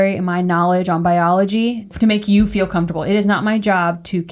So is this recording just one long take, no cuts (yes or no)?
no